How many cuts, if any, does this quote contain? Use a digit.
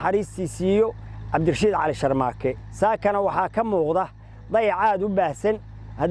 1